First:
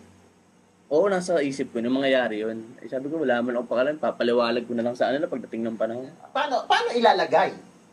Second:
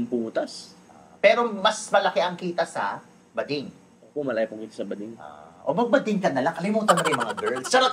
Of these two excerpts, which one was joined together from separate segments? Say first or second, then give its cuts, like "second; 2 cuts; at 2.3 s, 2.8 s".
first; 1 cut; at 6.3 s